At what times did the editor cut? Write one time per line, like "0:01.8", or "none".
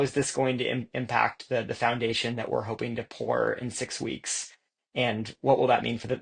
none